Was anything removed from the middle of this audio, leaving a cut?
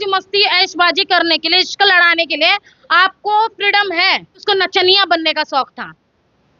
yes; 1 cut; at 4.4 s

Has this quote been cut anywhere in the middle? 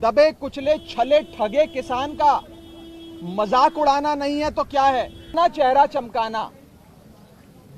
yes; 1 cut; at 5.3 s

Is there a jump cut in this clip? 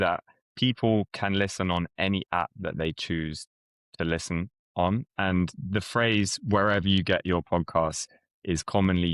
no; 0 cuts

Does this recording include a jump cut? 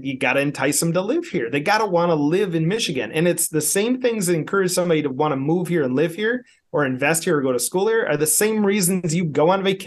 no; 0 cuts

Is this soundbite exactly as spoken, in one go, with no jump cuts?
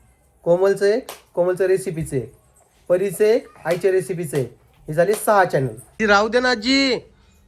no; 1 cut; at 5.8 s

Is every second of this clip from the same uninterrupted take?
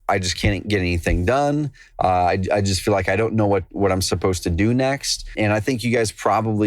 no; 1 cut; at 5.3 s

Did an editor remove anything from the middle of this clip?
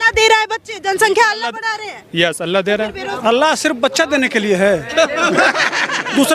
yes; 1 cut; at 3.0 s

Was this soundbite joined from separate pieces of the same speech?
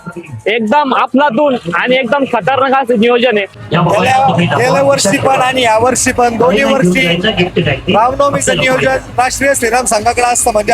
yes; 1 cut; at 3.7 s

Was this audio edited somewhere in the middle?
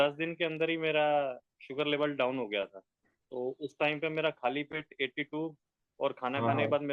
no; 0 cuts

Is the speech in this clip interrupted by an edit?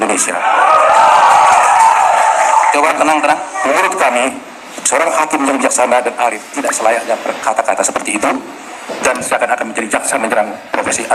no; 0 cuts

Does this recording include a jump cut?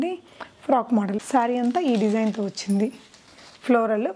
yes; 1 cut; at 1.2 s

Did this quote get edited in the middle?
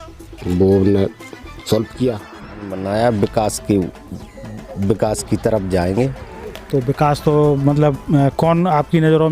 yes; 1 cut; at 2.8 s

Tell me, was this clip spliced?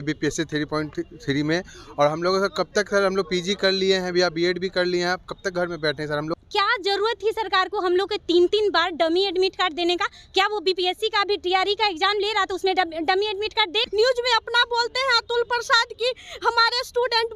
yes; 2 cuts; at 6.3 s, 13.8 s

